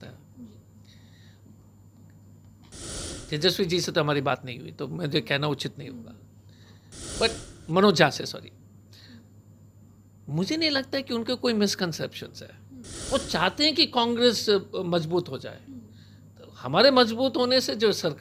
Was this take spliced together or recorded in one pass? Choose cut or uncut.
uncut